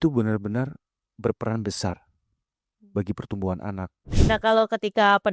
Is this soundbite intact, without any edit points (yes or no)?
no